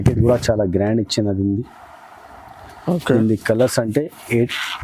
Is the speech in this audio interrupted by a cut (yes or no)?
no